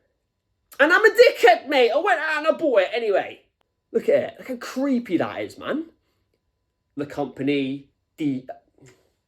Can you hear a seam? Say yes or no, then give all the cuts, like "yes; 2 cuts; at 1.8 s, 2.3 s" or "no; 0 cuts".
yes; 2 cuts; at 3.5 s, 7.0 s